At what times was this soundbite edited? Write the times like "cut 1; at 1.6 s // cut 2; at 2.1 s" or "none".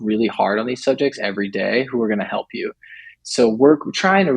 cut 1; at 3.1 s